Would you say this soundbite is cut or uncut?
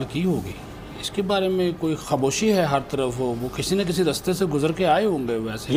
uncut